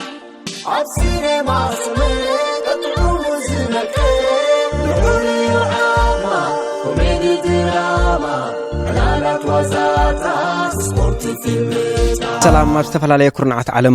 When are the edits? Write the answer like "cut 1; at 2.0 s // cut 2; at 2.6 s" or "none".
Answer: cut 1; at 12.4 s